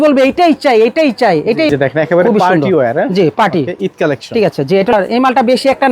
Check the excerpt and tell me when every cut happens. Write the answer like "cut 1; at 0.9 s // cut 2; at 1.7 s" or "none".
cut 1; at 1.7 s // cut 2; at 4.9 s